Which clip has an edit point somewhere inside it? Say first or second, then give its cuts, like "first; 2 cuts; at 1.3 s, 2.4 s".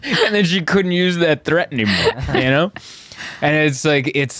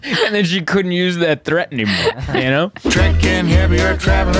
second; 1 cut; at 2.8 s